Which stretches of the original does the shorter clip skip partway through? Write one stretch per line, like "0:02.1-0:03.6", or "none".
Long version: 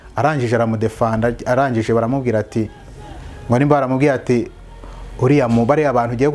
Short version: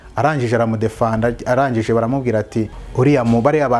0:02.8-0:05.0